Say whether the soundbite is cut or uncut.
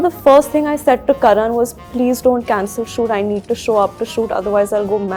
uncut